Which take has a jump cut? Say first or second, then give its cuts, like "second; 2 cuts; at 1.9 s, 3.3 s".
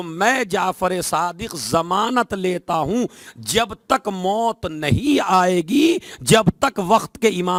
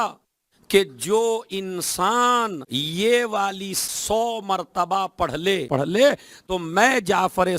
second; 3 cuts; at 2.7 s, 3.8 s, 5.6 s